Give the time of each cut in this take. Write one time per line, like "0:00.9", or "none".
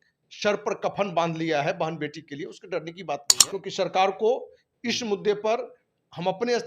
0:03.3